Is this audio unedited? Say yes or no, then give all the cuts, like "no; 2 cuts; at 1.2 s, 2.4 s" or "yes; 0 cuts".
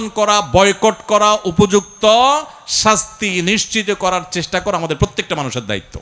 yes; 0 cuts